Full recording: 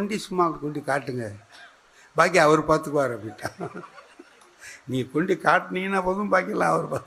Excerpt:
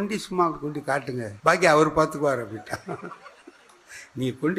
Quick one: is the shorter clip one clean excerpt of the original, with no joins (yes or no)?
no